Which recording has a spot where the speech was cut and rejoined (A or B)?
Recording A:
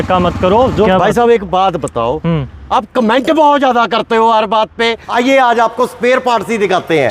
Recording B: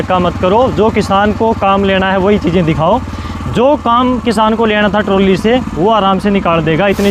A